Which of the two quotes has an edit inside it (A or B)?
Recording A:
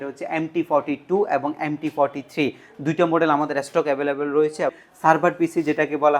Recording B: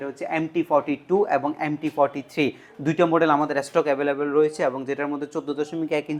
A